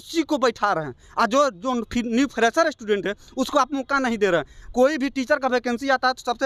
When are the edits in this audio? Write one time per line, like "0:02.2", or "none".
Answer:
none